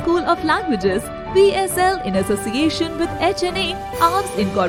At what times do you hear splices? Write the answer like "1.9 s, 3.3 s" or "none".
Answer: none